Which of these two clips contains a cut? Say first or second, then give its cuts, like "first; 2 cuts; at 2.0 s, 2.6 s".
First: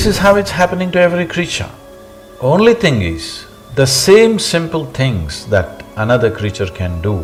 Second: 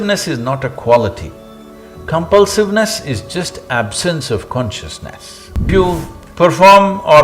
second; 1 cut; at 5.7 s